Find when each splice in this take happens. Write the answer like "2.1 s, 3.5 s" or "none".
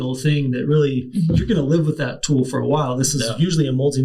1.1 s